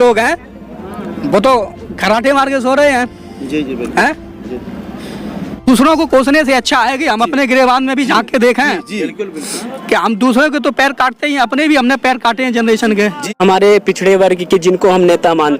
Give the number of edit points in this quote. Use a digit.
2